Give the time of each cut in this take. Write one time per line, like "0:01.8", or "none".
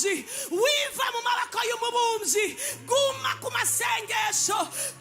none